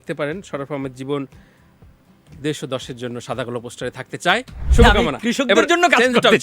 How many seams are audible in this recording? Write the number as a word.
one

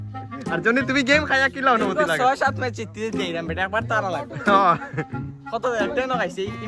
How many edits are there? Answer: zero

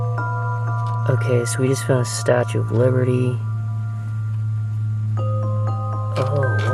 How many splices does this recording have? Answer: zero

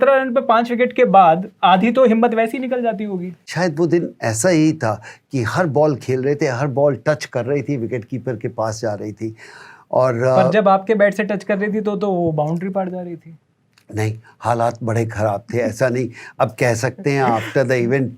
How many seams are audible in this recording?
one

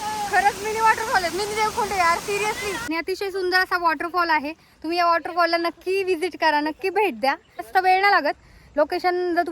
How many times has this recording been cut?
two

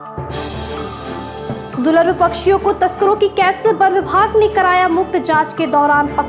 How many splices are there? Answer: zero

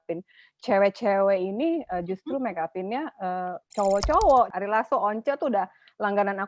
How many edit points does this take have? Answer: two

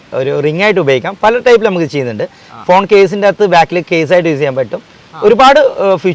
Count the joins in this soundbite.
zero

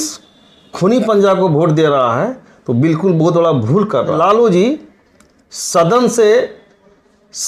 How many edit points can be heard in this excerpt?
one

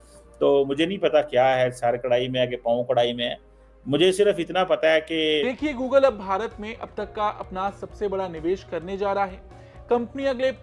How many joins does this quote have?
one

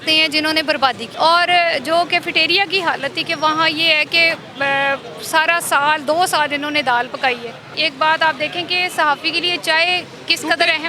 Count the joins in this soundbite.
two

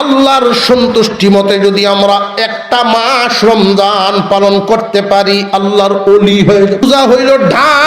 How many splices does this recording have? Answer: one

